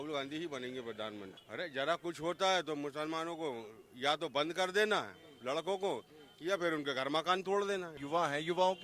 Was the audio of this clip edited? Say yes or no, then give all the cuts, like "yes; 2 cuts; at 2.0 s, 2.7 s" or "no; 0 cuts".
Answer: yes; 2 cuts; at 1.4 s, 8.0 s